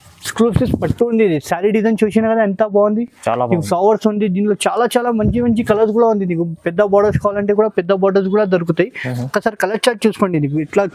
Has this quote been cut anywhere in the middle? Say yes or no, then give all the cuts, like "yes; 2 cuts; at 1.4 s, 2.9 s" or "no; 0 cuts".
no; 0 cuts